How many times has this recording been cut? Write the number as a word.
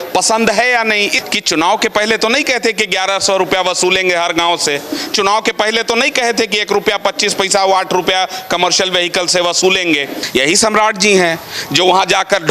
two